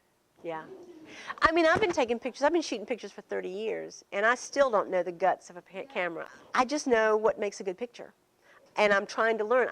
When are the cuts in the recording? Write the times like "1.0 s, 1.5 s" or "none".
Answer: 6.2 s